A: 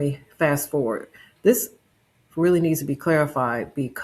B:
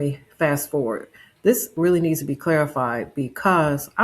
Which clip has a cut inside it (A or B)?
B